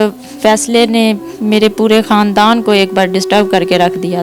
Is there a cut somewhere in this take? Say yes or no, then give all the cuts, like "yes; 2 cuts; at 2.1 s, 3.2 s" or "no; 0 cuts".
no; 0 cuts